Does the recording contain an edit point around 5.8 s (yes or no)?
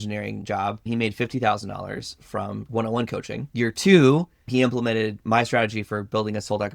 no